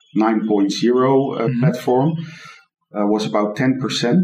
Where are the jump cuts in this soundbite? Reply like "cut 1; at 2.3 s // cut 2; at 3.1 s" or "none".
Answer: none